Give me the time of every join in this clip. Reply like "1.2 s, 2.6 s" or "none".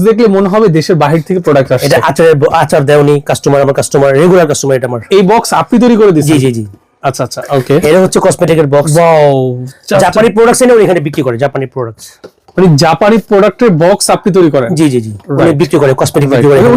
none